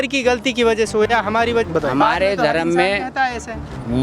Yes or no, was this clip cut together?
yes